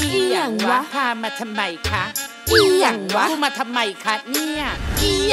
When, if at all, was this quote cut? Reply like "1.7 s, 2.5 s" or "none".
none